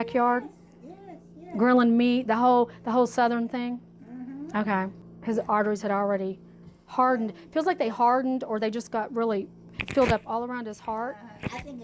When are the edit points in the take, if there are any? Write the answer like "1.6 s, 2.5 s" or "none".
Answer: 5.1 s